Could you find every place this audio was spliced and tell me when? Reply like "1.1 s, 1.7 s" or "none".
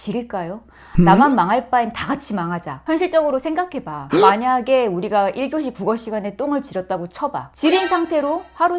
2.7 s, 7.5 s